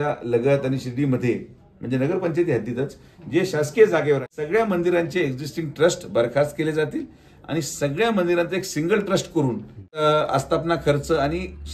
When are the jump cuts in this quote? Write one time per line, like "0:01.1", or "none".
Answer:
0:04.3
0:10.0